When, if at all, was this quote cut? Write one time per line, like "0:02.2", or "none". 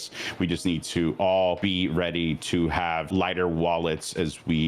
0:01.6
0:03.1